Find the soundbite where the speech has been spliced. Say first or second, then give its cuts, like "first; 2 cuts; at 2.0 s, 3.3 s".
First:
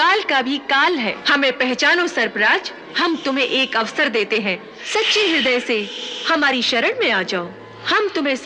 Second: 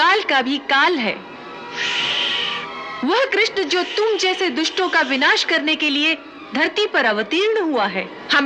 first; 3 cuts; at 1.2 s, 2.9 s, 4.7 s